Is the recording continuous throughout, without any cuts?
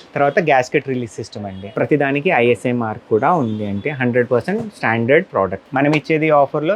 no; 2 cuts; at 1.6 s, 5.6 s

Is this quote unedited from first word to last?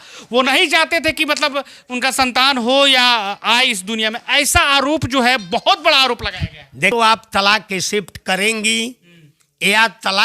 no; 1 cut; at 6.9 s

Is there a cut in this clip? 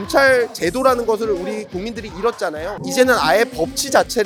no; 0 cuts

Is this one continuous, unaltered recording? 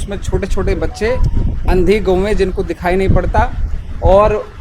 yes; 0 cuts

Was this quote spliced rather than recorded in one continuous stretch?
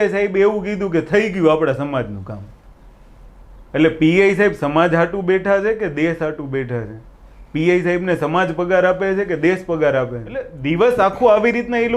yes; 1 cut; at 10.5 s

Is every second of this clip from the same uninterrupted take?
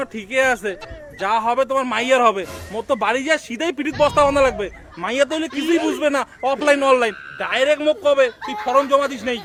yes; 0 cuts

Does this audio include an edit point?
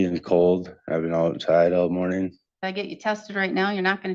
no; 0 cuts

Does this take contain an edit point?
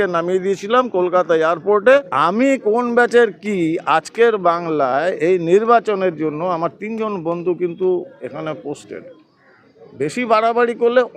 yes; 1 cut; at 2.1 s

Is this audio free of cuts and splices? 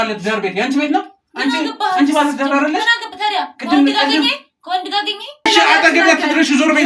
no; 1 cut; at 5.5 s

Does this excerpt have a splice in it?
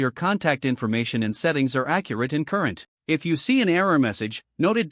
yes; 1 cut; at 2.9 s

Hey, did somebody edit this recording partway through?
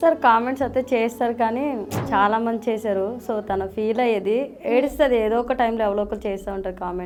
no; 0 cuts

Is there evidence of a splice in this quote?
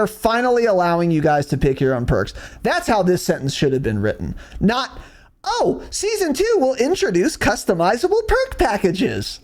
no; 0 cuts

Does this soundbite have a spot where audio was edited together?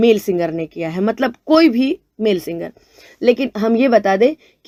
no; 0 cuts

